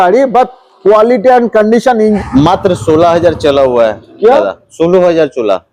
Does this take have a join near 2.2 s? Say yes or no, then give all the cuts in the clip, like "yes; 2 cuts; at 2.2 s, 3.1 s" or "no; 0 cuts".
yes; 1 cut; at 2.2 s